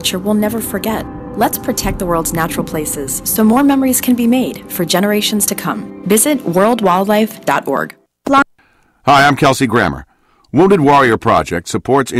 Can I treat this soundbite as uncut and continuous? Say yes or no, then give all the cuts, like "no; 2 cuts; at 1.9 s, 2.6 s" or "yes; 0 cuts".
no; 1 cut; at 8.4 s